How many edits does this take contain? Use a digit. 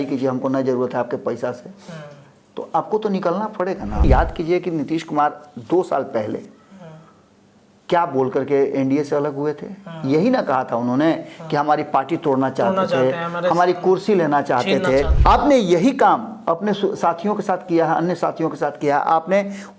2